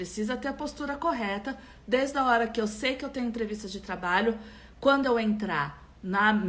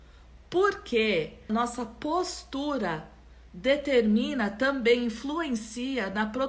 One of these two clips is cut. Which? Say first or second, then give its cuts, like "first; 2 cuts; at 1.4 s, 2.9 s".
second; 1 cut; at 1.4 s